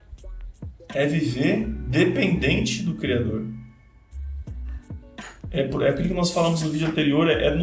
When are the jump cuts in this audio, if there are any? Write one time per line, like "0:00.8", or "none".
0:00.9